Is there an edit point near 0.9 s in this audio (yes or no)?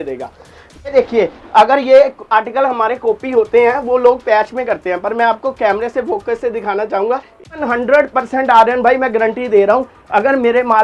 yes